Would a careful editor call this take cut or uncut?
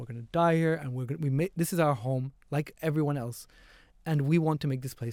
uncut